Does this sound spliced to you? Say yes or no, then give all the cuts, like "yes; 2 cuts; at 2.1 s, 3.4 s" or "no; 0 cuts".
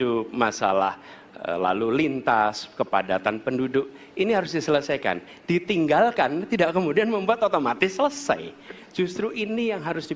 no; 0 cuts